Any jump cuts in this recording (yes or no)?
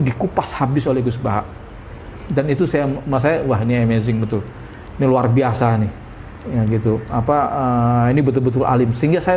no